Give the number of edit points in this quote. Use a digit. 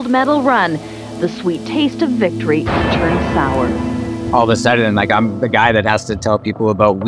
1